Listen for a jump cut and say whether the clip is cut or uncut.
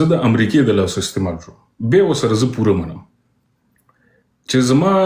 uncut